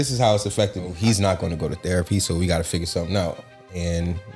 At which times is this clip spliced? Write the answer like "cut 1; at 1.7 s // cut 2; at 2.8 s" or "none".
cut 1; at 0.9 s